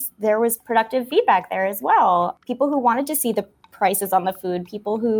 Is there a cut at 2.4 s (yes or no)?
yes